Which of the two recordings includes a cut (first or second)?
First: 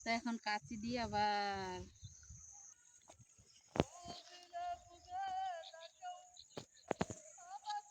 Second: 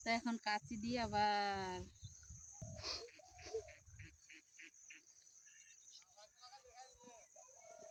first